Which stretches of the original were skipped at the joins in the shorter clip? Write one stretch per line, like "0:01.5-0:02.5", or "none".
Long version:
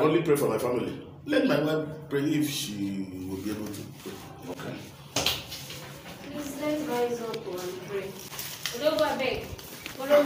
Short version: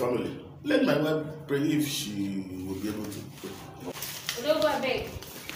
0:04.6-0:08.3